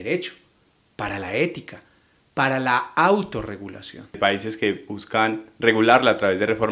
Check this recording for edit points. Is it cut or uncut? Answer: cut